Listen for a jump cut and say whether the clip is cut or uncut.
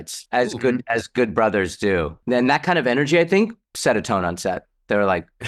cut